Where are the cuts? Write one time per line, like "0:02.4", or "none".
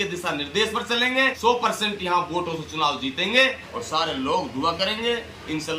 0:01.3
0:03.7